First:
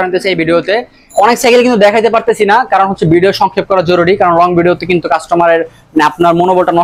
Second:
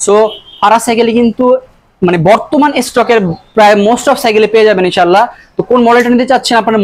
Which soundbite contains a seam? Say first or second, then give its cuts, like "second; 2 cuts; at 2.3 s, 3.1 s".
first; 1 cut; at 1.0 s